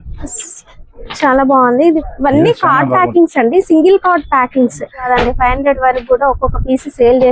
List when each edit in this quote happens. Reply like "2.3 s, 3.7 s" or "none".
2.0 s, 5.0 s